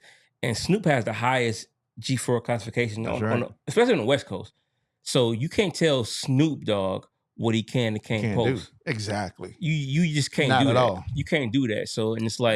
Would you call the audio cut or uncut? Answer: uncut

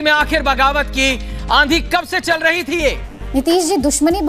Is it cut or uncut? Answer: uncut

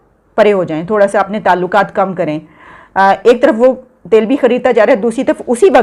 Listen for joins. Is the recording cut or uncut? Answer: uncut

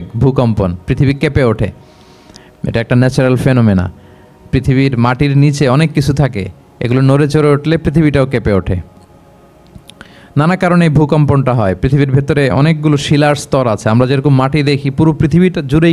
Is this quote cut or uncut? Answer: uncut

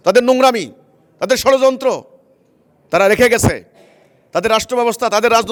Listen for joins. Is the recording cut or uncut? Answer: uncut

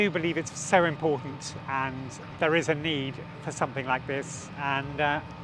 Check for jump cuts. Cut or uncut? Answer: cut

